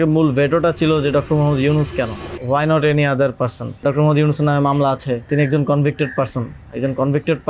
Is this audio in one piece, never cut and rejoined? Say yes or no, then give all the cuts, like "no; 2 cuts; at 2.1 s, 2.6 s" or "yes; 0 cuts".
no; 3 cuts; at 2.3 s, 3.8 s, 5.3 s